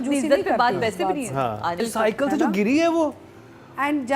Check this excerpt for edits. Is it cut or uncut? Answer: cut